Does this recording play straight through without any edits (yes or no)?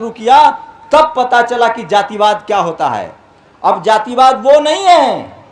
yes